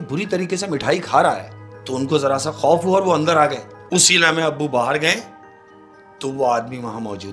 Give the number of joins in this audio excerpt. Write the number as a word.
one